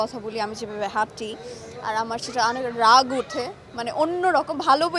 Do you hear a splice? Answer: no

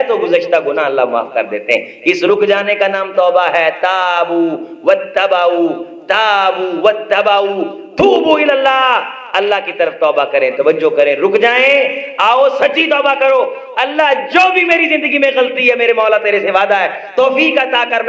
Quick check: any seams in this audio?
no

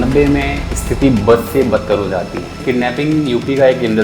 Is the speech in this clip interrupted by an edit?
yes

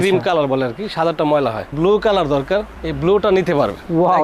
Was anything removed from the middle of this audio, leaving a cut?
yes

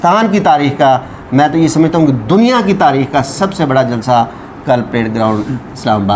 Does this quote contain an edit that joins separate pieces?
no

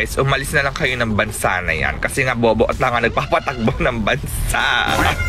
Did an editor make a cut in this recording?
no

